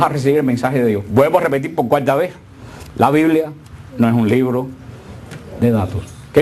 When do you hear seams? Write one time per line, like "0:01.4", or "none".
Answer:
0:03.3